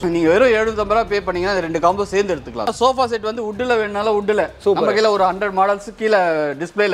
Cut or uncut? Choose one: cut